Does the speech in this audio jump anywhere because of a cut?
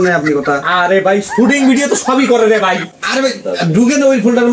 yes; 1 cut; at 3.0 s

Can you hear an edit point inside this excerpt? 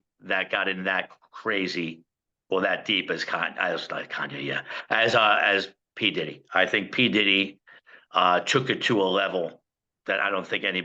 no; 0 cuts

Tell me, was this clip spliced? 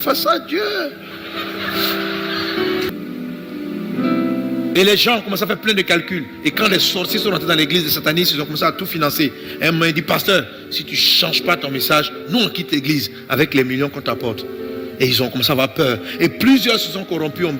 yes; 1 cut; at 2.9 s

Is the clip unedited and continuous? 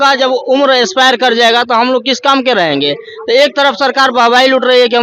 yes; 0 cuts

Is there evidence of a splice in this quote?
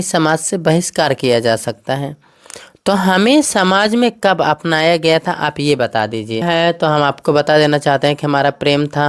yes; 1 cut; at 6.4 s

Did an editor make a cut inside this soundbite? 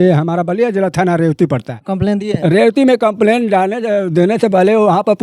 yes; 1 cut; at 1.9 s

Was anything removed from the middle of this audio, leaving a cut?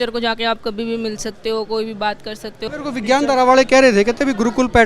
yes; 1 cut; at 2.6 s

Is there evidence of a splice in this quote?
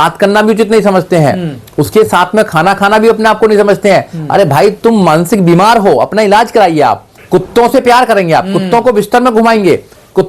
yes; 1 cut; at 7.1 s

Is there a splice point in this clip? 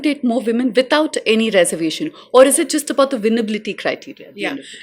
no; 0 cuts

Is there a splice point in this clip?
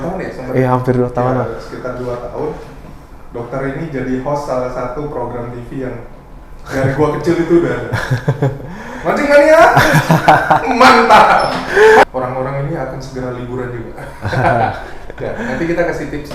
yes; 1 cut; at 12.0 s

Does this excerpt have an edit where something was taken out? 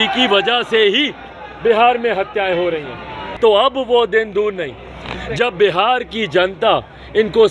yes; 1 cut; at 3.3 s

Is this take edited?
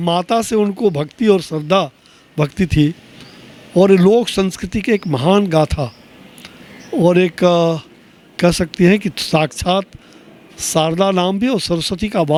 no; 0 cuts

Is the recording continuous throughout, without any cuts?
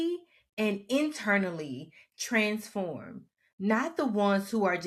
yes; 0 cuts

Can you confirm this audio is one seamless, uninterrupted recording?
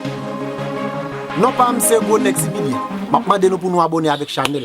no; 1 cut; at 1.3 s

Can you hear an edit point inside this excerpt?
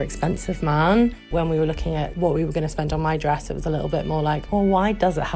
yes; 1 cut; at 1.2 s

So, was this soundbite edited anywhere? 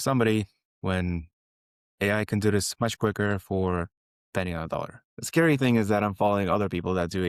no; 0 cuts

